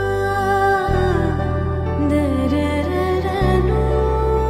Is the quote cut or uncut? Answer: uncut